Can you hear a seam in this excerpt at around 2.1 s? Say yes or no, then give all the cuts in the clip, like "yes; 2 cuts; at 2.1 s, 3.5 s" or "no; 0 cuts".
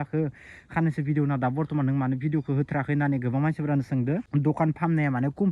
no; 1 cut; at 4.3 s